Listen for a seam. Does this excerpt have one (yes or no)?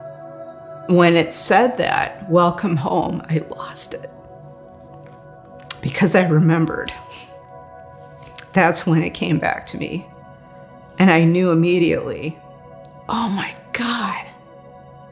no